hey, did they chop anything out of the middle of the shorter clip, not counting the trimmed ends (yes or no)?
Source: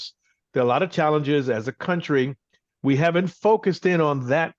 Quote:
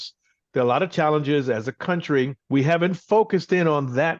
yes